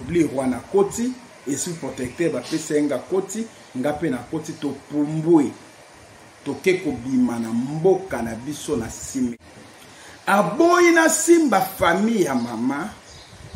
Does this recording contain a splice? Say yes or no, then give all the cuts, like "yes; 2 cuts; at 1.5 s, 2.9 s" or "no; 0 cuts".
yes; 1 cut; at 9.4 s